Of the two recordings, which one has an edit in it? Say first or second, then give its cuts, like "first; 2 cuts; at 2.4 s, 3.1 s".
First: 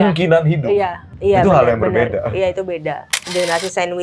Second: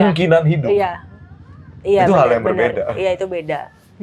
first; 2 cuts; at 1.0 s, 3.2 s